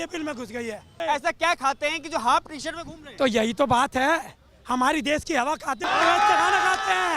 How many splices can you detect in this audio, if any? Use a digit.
2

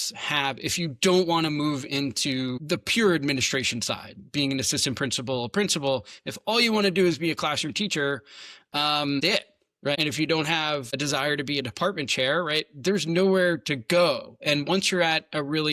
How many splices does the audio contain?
2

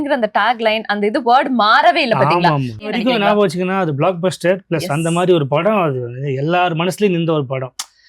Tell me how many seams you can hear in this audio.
1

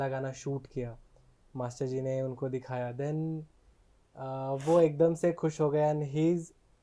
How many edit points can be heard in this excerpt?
0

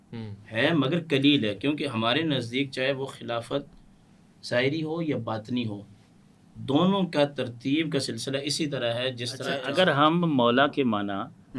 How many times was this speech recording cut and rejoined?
1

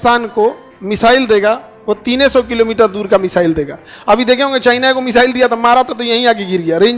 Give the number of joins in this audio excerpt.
0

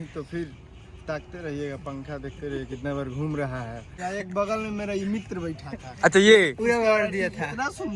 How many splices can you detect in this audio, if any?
1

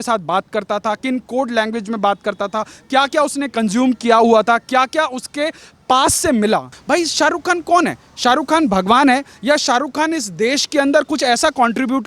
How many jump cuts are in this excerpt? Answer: 1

